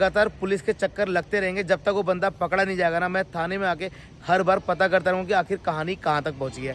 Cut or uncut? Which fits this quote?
uncut